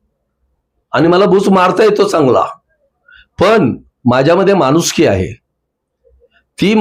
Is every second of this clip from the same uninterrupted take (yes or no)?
yes